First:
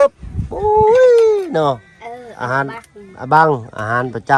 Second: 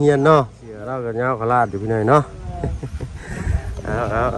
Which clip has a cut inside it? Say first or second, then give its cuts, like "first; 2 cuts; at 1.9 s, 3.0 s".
second; 1 cut; at 1.0 s